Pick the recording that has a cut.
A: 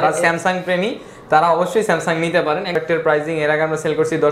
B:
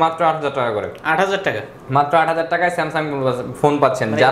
A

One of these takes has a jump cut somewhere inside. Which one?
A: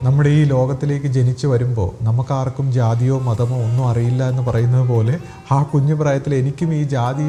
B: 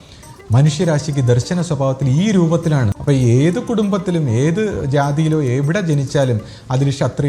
B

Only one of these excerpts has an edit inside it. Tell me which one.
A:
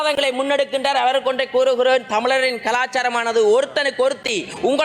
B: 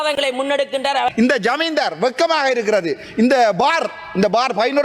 B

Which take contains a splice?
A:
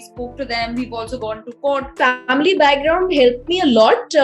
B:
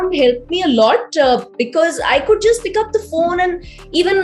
A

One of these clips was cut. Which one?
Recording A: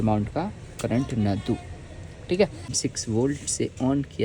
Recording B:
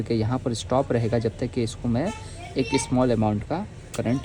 A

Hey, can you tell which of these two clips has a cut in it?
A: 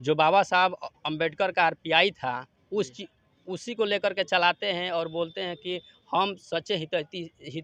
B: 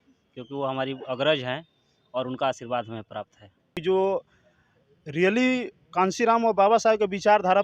B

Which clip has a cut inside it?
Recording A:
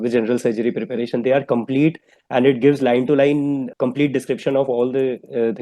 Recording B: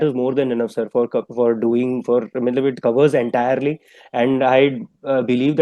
A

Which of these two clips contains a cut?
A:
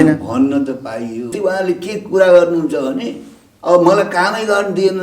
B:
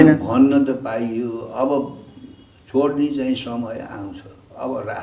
A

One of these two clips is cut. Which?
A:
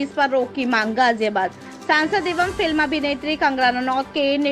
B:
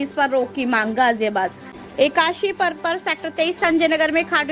B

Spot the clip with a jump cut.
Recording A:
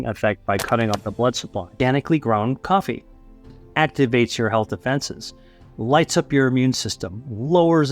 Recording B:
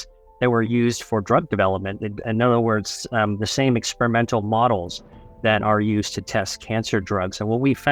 A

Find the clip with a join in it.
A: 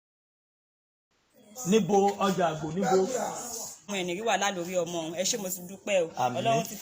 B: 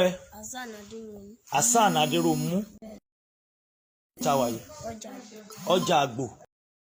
A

